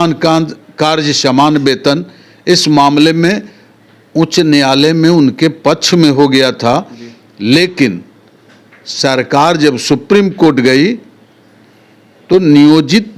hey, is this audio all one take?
yes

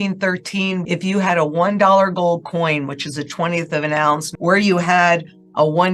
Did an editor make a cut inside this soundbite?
yes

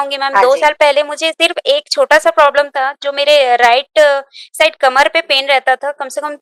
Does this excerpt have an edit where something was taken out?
no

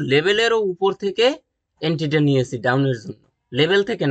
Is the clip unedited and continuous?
yes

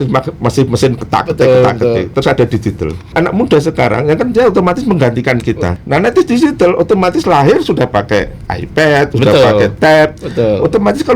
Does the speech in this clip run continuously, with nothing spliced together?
no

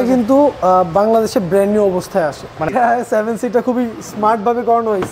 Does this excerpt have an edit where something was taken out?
yes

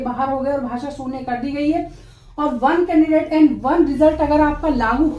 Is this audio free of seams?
yes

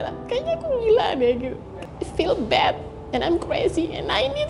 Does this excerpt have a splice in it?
yes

